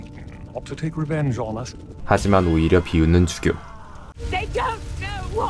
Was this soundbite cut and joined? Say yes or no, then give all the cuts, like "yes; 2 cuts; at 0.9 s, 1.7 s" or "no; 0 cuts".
yes; 1 cut; at 4.1 s